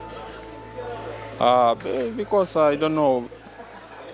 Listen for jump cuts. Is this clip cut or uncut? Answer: uncut